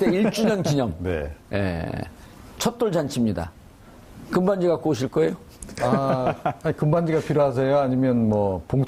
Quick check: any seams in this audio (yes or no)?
yes